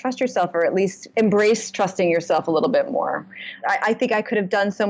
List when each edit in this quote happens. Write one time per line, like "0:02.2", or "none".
0:01.0
0:03.6

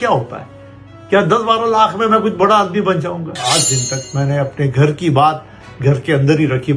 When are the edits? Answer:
0:03.4

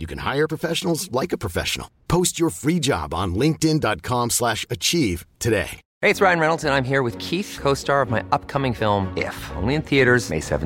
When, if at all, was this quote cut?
0:05.8

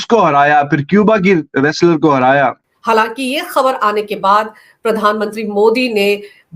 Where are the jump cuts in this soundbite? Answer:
0:02.7

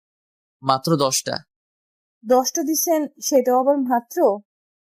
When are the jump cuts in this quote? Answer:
none

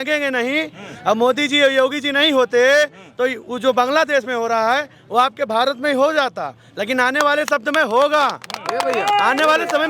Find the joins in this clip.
none

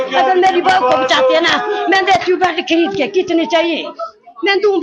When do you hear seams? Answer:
none

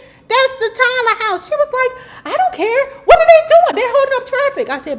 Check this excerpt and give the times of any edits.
none

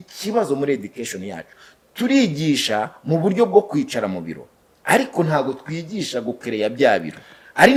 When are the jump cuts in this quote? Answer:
none

